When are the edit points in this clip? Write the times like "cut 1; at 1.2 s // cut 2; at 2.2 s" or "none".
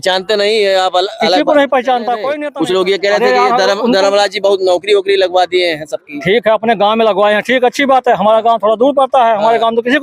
cut 1; at 2.4 s